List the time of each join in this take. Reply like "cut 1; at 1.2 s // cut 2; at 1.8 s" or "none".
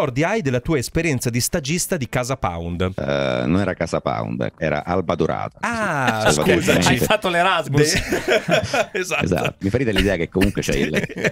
cut 1; at 3.0 s // cut 2; at 4.6 s // cut 3; at 9.6 s